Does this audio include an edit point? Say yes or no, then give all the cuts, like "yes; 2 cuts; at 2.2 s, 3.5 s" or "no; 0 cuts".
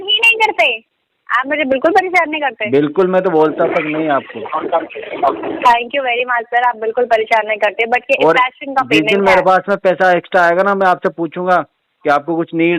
no; 0 cuts